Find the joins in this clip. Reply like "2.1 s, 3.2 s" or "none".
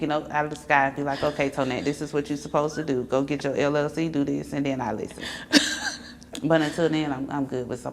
none